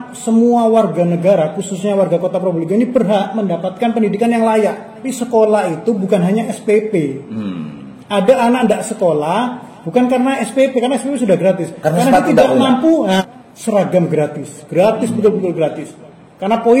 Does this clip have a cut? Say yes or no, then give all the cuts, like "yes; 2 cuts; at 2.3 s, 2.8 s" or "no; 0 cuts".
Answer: yes; 2 cuts; at 5.1 s, 13.2 s